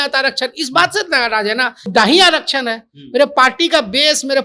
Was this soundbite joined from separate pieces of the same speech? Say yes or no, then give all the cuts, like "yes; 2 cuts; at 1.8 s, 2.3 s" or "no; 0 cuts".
yes; 1 cut; at 1.9 s